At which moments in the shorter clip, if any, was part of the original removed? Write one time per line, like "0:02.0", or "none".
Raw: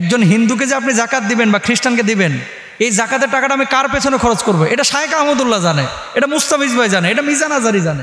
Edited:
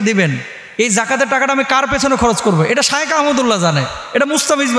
none